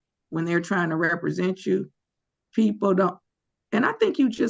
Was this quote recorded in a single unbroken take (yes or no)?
yes